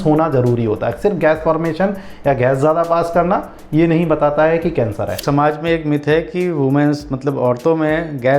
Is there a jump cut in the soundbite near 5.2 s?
yes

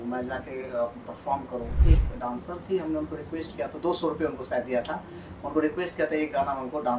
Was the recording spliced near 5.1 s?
no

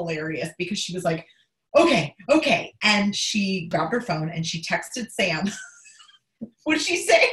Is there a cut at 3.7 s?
yes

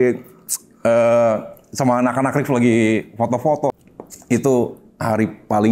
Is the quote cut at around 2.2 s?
no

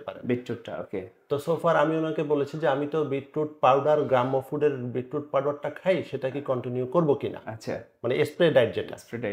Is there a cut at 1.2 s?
no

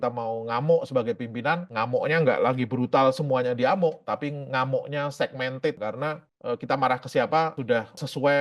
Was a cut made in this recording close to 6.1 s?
yes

